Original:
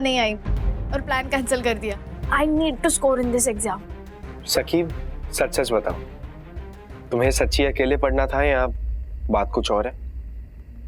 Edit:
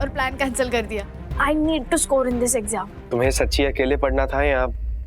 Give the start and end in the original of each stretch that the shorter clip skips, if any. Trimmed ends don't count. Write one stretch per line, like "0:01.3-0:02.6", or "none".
0:03.9-0:06.9